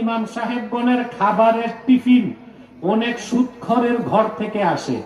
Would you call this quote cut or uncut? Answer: uncut